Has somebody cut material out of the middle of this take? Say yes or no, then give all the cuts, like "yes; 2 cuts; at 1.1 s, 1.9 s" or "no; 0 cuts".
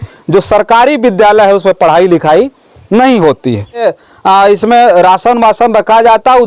yes; 1 cut; at 3.8 s